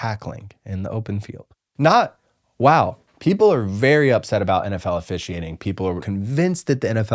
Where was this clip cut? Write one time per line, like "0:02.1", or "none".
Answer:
0:01.6
0:06.0